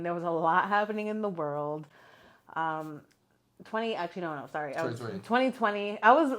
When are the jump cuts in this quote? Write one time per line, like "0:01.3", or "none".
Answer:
none